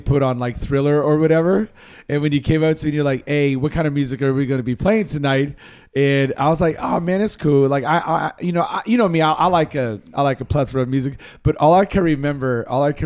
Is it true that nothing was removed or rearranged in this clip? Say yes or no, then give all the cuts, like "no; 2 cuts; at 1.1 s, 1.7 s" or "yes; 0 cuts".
yes; 0 cuts